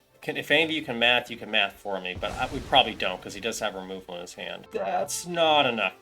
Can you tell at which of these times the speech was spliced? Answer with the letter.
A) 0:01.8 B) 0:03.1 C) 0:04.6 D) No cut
C